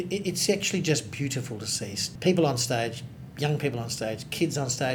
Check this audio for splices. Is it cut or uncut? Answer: cut